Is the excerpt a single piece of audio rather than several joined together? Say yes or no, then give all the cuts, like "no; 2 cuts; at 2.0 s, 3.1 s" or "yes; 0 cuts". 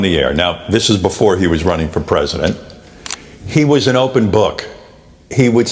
yes; 0 cuts